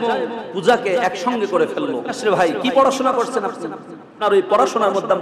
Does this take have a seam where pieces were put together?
yes; 2 cuts; at 2.2 s, 4.2 s

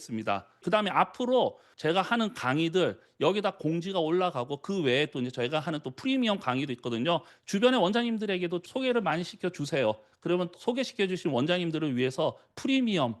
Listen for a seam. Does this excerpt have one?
yes; 3 cuts; at 7.3 s, 8.6 s, 10.5 s

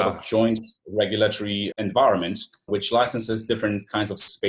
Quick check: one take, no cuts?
no; 2 cuts; at 1.6 s, 2.7 s

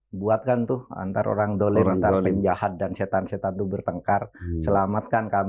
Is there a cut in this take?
no; 0 cuts

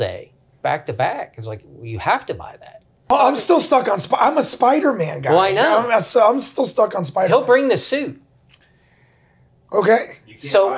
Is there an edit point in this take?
yes; 1 cut; at 3.1 s

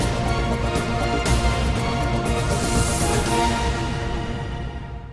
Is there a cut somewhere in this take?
no; 0 cuts

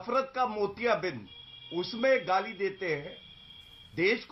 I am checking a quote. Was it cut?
no; 0 cuts

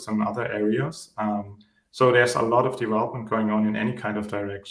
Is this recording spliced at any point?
no; 0 cuts

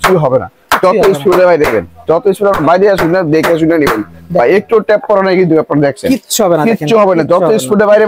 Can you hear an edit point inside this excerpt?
no; 0 cuts

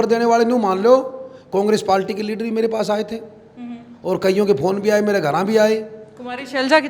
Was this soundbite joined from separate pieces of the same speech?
no; 0 cuts

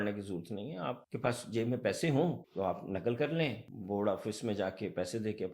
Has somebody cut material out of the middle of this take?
yes; 3 cuts; at 1.1 s, 2.4 s, 3.7 s

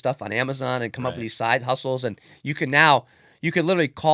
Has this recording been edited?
no; 0 cuts

